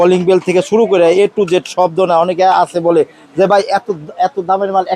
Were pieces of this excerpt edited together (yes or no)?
no